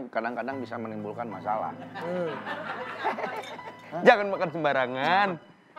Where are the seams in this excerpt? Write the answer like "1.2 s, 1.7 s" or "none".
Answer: none